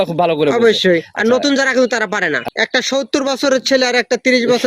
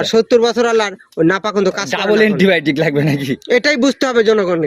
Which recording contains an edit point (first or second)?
first